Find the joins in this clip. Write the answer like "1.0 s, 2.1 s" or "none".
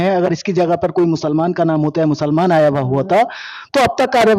none